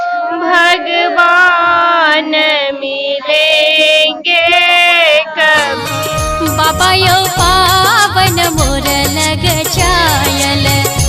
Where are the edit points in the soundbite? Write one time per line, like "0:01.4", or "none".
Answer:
0:05.9